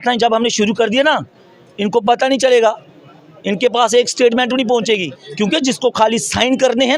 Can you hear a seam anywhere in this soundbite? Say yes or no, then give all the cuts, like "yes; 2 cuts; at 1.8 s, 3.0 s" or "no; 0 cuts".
yes; 1 cut; at 5.2 s